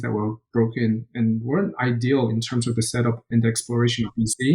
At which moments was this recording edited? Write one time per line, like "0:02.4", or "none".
0:03.3